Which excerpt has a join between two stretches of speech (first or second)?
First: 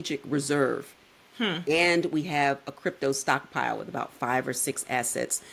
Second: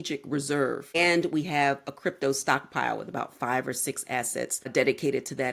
second